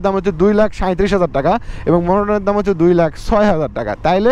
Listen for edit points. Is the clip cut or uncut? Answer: uncut